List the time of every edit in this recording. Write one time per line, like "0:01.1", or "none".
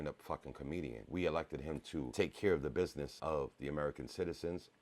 0:01.0
0:02.1
0:03.1